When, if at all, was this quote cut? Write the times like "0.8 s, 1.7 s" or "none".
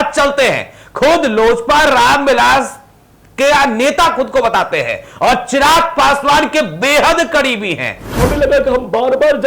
8.1 s